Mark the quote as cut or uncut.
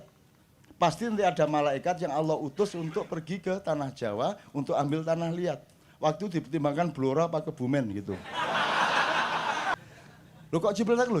cut